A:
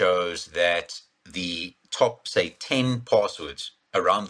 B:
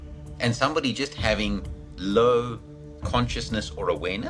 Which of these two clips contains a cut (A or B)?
B